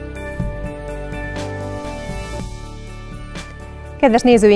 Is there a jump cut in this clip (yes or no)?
no